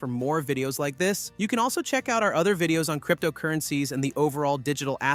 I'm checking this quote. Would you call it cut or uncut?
uncut